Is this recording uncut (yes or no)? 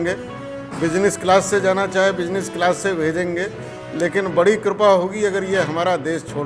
yes